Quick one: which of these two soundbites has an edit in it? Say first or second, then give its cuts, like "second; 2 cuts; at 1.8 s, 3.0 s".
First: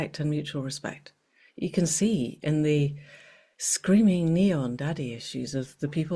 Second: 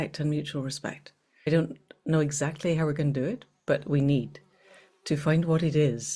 second; 1 cut; at 1.5 s